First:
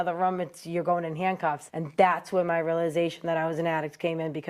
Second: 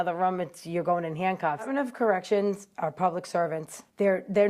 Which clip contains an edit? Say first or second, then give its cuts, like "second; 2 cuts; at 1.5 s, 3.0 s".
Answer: second; 1 cut; at 1.7 s